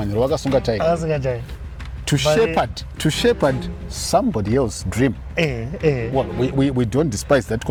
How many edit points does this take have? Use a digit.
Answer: 0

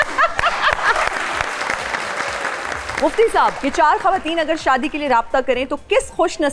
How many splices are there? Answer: 2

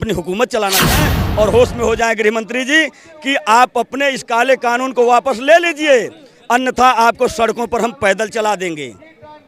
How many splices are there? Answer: 1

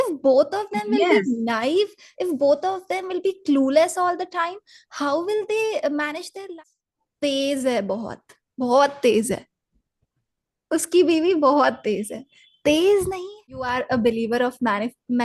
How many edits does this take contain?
2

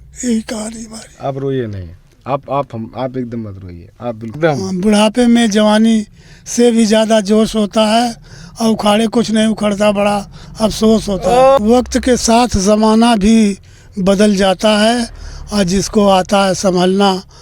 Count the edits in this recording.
2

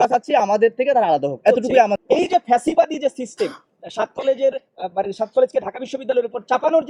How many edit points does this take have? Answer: 1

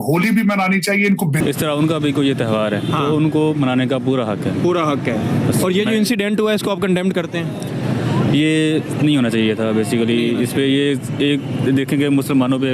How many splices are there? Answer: 1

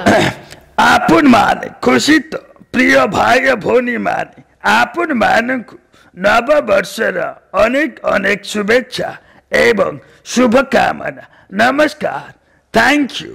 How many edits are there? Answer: 0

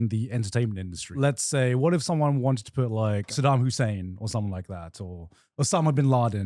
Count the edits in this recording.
2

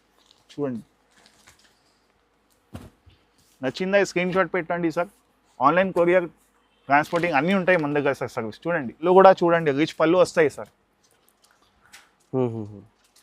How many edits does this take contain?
1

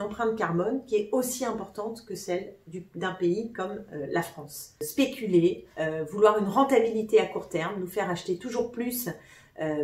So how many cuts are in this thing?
1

